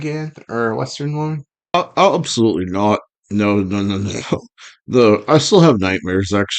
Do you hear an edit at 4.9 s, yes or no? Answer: no